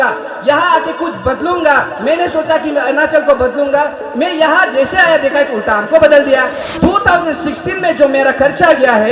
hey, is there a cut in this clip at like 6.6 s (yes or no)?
yes